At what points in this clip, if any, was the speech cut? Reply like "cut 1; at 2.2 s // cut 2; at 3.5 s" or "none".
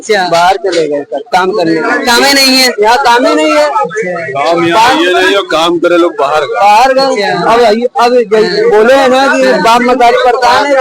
none